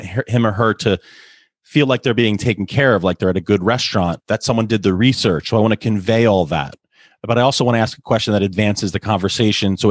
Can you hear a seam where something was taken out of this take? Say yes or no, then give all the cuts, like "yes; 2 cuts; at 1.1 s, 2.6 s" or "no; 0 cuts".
no; 0 cuts